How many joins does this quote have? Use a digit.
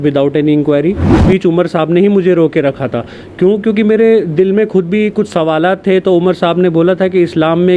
1